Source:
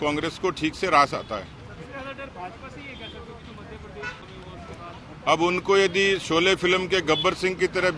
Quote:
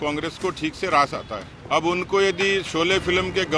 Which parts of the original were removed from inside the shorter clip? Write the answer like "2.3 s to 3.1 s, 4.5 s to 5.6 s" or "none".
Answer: 1.5 s to 5.0 s